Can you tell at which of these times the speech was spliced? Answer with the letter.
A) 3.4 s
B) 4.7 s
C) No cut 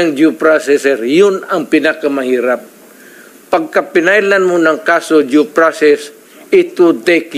C